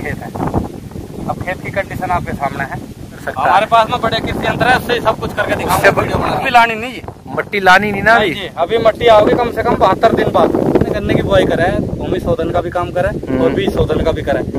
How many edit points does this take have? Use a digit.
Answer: 3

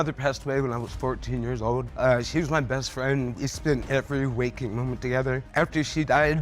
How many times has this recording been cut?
3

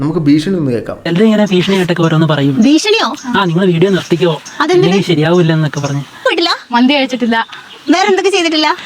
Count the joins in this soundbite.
2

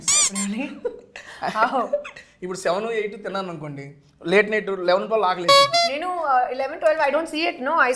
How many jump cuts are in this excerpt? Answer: 0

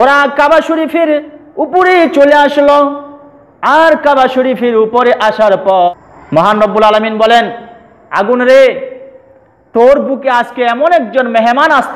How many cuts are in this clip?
1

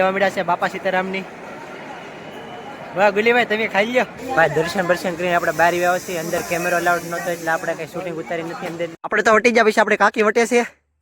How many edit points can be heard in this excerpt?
2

